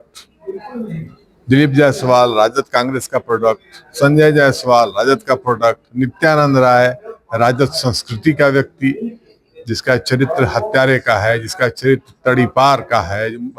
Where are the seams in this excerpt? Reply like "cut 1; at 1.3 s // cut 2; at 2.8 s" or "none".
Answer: none